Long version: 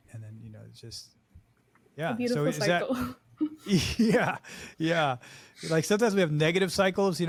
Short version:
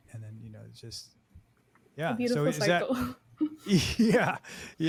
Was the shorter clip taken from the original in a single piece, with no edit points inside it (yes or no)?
yes